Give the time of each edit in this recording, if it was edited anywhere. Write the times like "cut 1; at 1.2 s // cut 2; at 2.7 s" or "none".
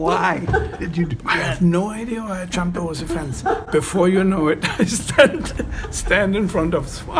none